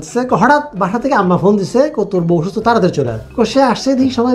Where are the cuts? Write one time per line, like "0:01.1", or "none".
0:03.2